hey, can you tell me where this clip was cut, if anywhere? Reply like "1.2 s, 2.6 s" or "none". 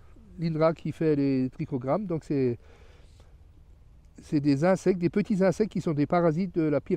none